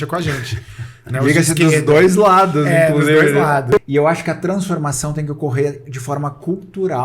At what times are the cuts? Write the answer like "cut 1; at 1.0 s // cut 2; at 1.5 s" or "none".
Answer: cut 1; at 3.8 s